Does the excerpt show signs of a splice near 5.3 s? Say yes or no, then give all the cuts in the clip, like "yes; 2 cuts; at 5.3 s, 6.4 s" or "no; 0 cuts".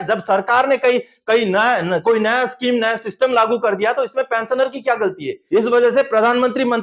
yes; 1 cut; at 5.3 s